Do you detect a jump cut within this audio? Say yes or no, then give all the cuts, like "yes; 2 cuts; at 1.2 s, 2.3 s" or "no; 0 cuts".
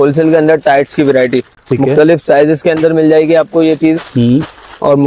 no; 0 cuts